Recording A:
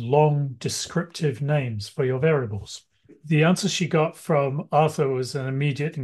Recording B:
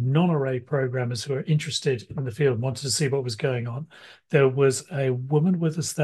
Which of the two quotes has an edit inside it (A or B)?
A